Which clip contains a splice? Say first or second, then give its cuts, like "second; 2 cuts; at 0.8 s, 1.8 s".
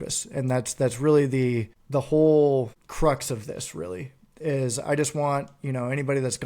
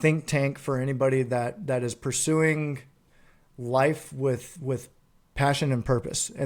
first; 2 cuts; at 1.8 s, 2.8 s